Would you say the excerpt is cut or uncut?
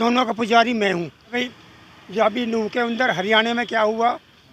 cut